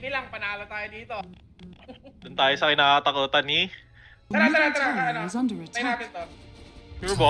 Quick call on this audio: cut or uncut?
cut